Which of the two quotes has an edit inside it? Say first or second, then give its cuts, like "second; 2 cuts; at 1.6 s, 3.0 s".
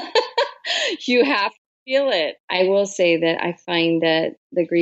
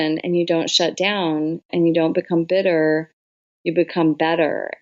first; 1 cut; at 2.4 s